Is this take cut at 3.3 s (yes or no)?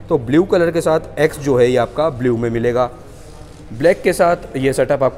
no